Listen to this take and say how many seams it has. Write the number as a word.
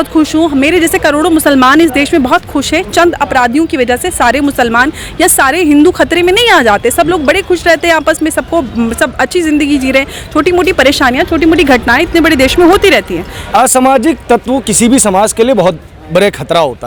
zero